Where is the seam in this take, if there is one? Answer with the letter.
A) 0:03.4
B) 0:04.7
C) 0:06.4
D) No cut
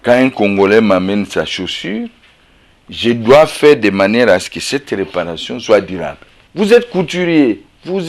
C